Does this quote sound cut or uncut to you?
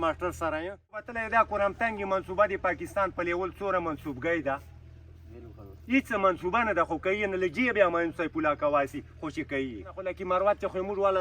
cut